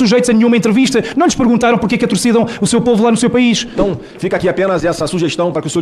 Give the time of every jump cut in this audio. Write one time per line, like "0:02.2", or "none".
0:03.7